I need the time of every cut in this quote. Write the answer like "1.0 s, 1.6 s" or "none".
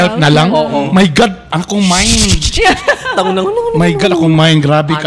none